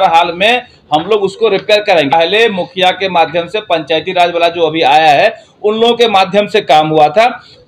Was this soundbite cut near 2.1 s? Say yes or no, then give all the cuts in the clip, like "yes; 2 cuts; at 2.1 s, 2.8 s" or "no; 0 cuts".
yes; 1 cut; at 2.1 s